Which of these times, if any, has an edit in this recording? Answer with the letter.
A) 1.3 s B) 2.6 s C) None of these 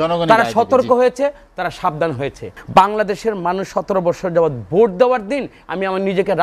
B